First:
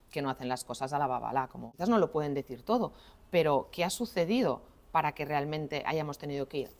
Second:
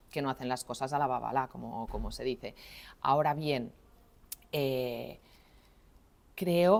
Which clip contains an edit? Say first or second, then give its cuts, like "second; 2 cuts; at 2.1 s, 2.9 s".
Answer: first; 1 cut; at 1.7 s